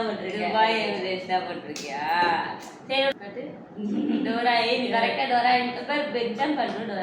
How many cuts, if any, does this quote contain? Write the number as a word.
one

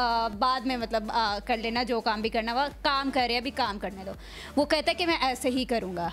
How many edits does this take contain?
zero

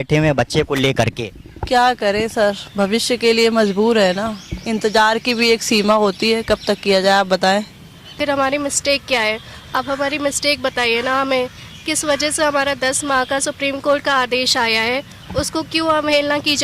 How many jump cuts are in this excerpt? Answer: one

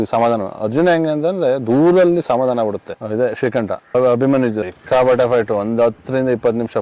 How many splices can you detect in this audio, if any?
two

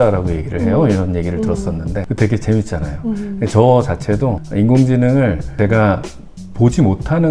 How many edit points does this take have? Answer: three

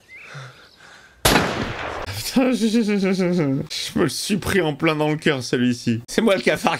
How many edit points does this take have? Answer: two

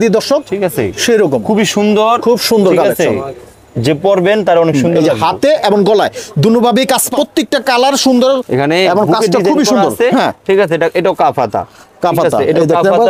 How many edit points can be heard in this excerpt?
two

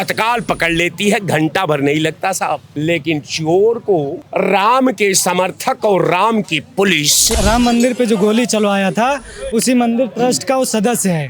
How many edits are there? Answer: three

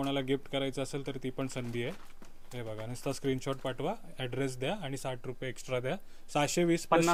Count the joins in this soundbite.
zero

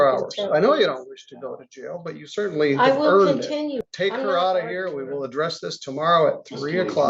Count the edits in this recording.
one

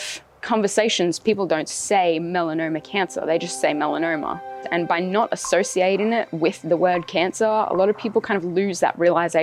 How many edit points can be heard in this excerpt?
zero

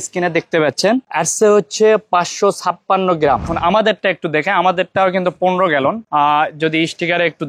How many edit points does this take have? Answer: one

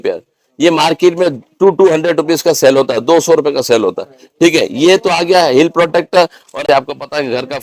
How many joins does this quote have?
one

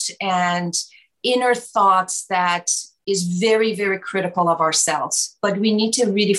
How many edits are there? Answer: zero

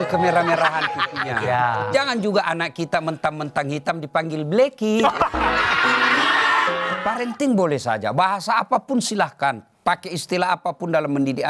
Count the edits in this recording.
one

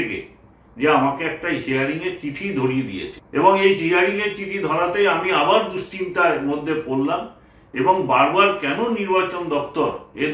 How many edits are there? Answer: one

